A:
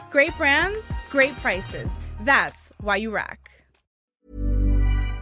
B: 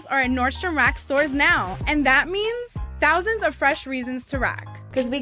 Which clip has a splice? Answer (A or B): A